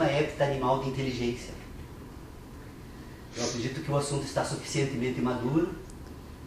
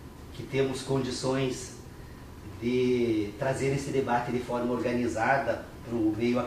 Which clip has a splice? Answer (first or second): first